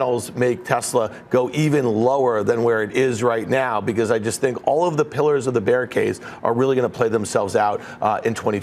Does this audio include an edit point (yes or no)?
no